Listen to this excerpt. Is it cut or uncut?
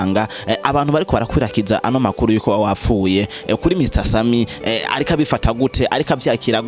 uncut